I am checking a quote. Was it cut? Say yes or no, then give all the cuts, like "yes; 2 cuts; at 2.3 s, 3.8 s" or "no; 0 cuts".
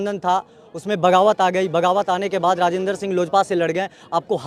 no; 0 cuts